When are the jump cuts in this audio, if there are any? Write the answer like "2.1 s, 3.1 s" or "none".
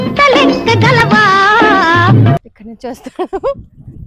2.5 s